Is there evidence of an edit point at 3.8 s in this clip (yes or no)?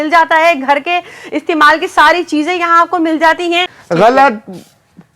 yes